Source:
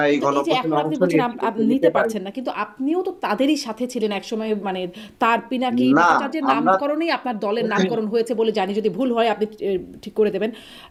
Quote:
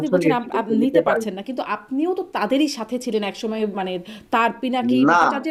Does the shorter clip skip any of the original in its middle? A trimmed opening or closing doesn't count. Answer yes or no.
no